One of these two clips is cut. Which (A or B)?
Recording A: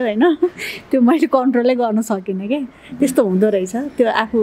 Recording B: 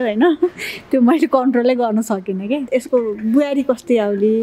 B